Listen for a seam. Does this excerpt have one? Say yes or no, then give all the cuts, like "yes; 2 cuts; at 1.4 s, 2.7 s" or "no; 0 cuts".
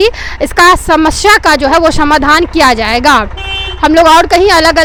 no; 0 cuts